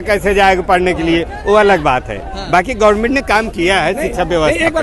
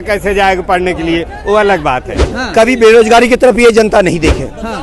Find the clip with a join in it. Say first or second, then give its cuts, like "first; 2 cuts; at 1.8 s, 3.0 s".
second; 1 cut; at 2.3 s